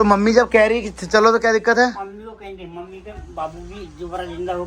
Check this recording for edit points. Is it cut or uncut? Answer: uncut